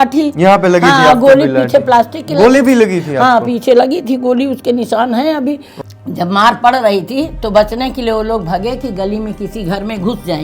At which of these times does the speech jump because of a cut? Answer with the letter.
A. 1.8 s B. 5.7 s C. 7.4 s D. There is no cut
B